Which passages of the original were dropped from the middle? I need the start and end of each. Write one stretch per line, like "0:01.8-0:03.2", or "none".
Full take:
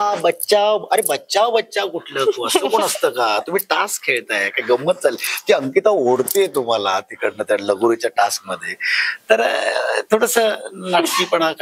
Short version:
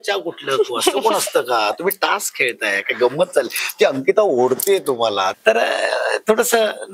0:07.0-0:09.2